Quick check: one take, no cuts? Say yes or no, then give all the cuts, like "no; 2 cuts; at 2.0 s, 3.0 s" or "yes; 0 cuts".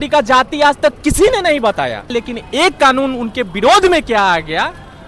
no; 1 cut; at 2.2 s